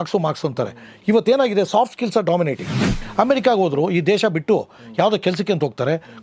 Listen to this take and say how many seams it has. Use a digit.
1